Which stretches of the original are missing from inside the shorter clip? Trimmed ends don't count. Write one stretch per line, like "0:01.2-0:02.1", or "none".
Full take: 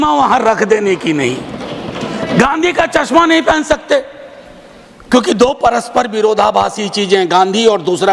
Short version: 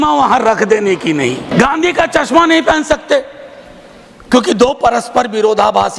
0:01.4-0:02.2

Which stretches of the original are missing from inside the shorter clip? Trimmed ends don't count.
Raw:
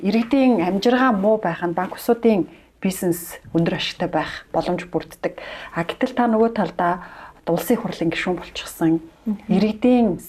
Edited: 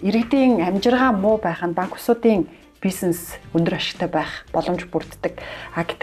none

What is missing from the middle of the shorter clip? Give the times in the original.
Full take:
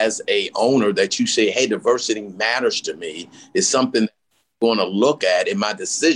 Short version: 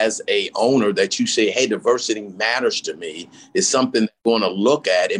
0:04.2-0:04.5

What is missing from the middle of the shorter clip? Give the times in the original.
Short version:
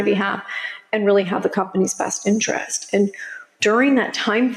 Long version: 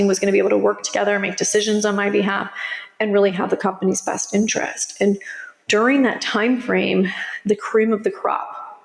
none

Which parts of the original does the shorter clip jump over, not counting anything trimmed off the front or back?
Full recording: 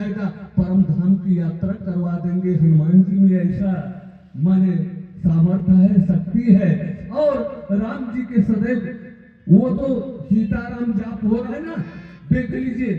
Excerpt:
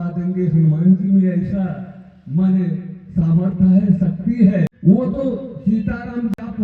0:06.8-0:09.4

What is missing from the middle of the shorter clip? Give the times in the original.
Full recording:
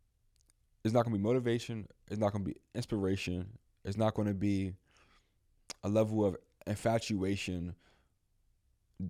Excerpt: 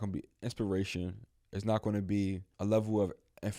0:04.8-0:05.7

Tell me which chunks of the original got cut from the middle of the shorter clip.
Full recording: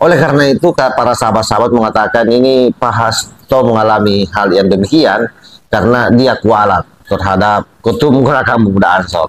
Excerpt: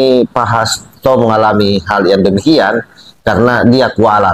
none

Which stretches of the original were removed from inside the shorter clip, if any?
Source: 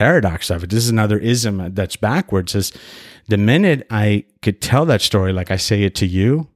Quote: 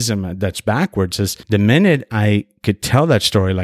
0:02.7-0:03.2

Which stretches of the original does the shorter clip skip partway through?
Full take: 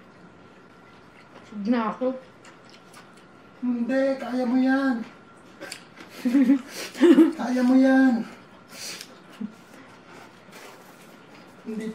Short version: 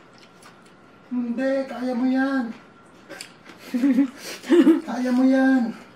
none

